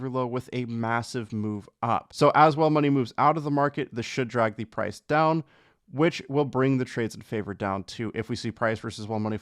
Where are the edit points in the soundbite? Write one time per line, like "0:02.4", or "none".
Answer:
0:02.1